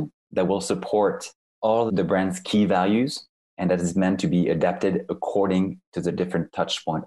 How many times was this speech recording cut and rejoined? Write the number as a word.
one